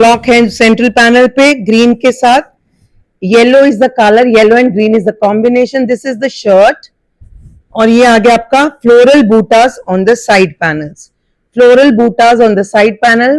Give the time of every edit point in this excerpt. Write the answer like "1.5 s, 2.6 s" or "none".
none